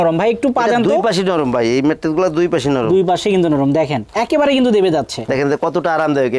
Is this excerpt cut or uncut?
cut